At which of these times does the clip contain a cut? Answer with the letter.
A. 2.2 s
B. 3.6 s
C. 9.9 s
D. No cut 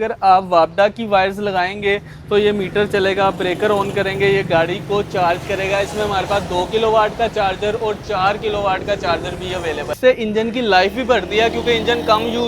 C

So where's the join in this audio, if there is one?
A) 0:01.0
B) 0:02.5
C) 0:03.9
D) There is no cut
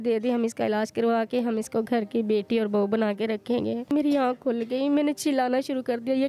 C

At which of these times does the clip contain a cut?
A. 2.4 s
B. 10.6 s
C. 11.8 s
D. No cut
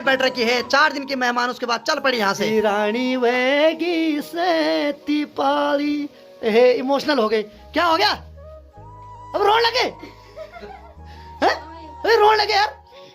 A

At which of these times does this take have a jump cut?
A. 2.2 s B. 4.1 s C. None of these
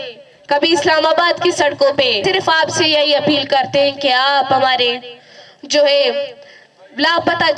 A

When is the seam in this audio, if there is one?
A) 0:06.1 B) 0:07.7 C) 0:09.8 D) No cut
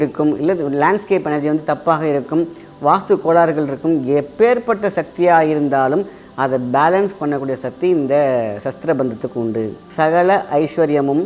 C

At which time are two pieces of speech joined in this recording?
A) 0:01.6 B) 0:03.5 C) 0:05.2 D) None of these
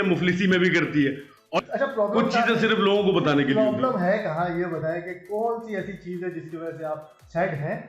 A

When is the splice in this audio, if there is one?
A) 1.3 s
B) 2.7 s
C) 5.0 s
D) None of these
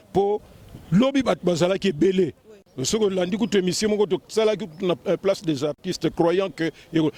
D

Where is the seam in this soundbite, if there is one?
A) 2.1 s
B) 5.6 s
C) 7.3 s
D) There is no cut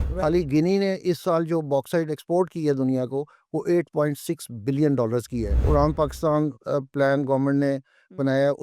B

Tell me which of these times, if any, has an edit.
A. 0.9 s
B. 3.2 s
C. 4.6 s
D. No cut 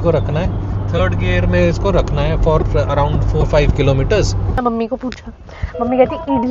C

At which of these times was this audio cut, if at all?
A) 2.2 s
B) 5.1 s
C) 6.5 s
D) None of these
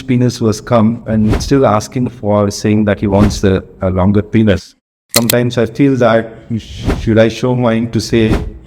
B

